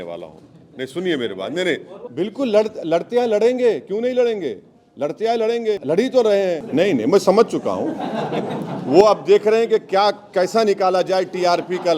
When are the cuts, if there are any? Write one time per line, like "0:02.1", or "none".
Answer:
0:01.9
0:05.8
0:06.6